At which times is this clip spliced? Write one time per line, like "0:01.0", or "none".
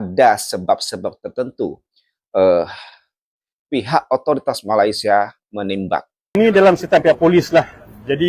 0:06.4